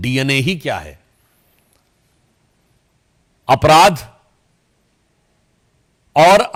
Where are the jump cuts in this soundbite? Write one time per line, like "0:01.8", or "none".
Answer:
none